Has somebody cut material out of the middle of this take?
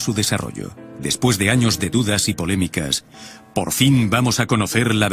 yes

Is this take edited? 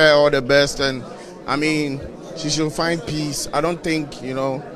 no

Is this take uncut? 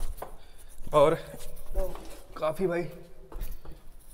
yes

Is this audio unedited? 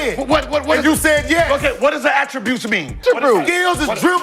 no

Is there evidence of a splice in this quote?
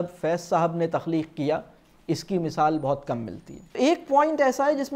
yes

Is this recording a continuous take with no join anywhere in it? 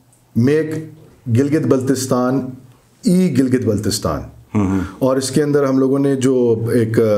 yes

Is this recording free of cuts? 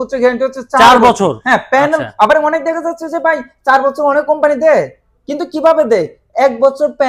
yes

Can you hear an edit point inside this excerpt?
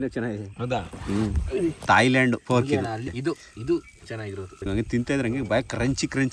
yes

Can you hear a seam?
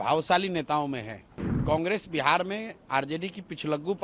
yes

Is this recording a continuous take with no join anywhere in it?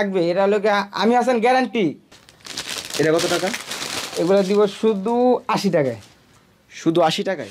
no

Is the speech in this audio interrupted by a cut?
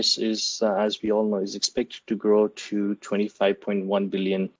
no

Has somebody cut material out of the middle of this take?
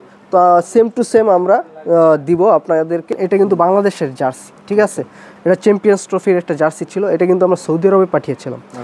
yes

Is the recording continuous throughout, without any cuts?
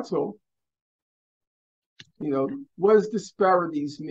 yes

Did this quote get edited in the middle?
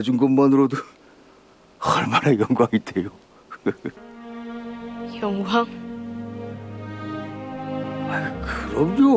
yes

